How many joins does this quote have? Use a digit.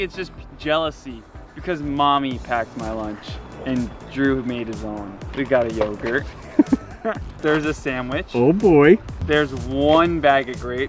3